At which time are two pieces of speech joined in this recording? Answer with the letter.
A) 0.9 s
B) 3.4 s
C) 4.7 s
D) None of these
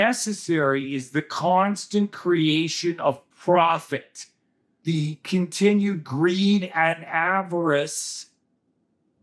C